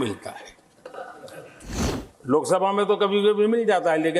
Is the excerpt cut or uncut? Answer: cut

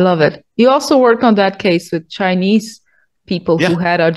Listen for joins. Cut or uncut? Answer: uncut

